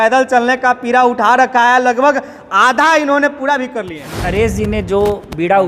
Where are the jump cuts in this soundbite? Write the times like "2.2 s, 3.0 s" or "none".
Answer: 4.3 s